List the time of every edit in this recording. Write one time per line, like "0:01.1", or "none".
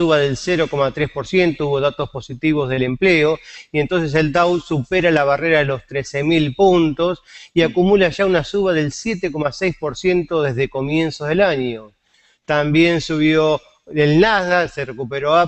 0:13.4